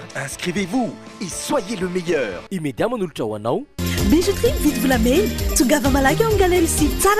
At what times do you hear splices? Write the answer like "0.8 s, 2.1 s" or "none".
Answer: none